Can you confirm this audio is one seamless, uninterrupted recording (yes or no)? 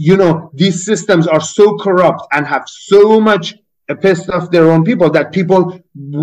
yes